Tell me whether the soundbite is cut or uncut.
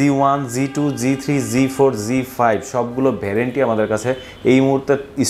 uncut